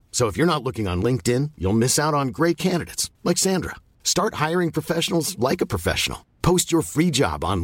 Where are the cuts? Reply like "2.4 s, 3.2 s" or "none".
none